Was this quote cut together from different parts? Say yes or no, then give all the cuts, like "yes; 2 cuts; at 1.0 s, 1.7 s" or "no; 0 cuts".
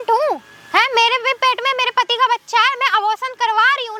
no; 0 cuts